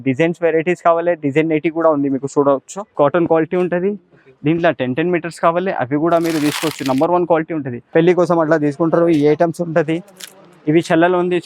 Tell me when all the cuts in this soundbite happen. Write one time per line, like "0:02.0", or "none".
0:02.8
0:07.8